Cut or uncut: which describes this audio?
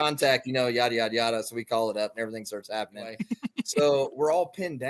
cut